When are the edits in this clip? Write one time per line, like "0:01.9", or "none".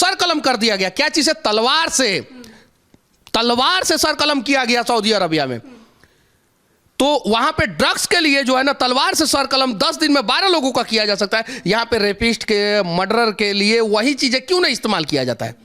none